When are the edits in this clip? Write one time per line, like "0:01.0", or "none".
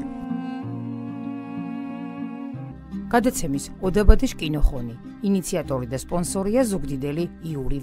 0:02.7